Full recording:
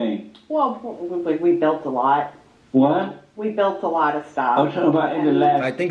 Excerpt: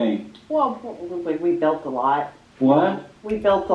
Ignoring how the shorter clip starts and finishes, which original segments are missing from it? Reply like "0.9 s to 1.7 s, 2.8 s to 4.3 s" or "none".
2.4 s to 2.5 s

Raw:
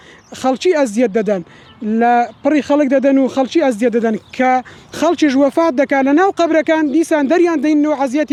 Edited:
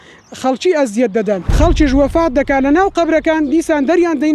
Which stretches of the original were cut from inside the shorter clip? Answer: 1.5 s to 4.9 s

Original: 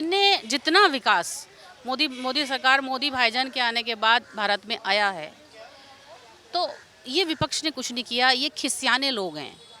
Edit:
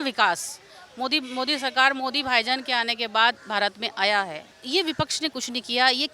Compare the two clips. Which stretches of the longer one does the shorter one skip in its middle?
5.4 s to 6.9 s

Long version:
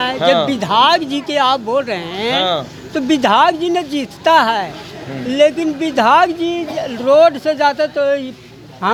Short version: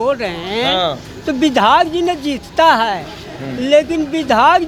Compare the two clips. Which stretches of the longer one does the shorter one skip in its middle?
none

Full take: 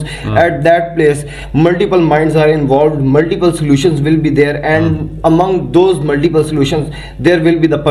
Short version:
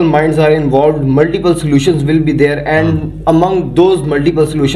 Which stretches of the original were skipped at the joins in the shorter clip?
none

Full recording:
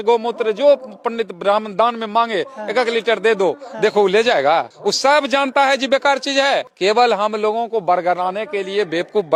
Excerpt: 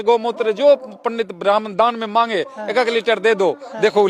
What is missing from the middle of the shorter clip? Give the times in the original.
none

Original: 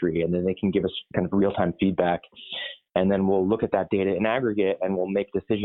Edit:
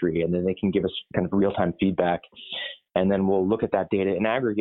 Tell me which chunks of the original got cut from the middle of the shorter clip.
none

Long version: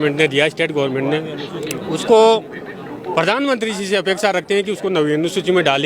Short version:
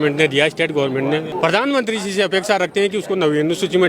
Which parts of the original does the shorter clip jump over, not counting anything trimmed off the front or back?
1.3 s to 3.0 s

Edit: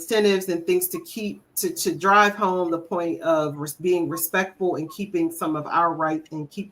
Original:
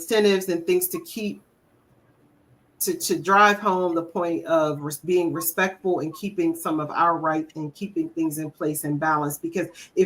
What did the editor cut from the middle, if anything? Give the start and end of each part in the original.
1.4 s to 2.7 s

